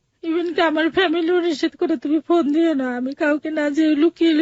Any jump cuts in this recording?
no; 0 cuts

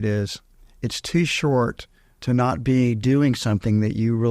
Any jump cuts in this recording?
no; 0 cuts

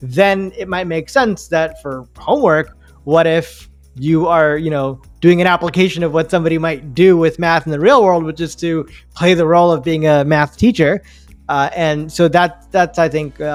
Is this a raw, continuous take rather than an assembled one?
yes; 0 cuts

